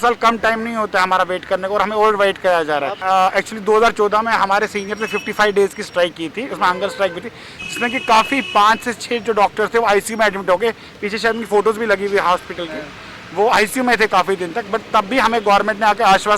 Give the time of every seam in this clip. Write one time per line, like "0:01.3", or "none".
0:02.9